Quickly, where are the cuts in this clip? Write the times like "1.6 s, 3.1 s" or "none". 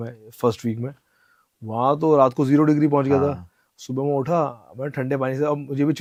none